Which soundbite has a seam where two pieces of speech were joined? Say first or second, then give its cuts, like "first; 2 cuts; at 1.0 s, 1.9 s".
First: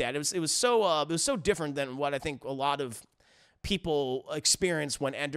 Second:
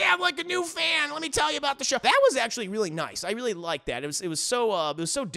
second; 1 cut; at 2.0 s